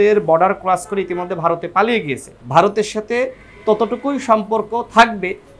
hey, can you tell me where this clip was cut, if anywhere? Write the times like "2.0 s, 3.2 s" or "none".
2.3 s